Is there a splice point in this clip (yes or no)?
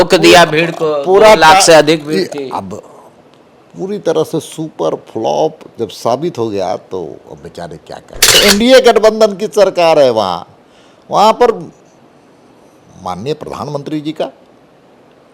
yes